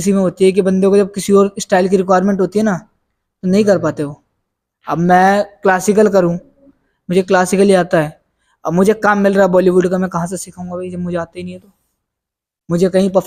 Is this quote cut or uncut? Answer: uncut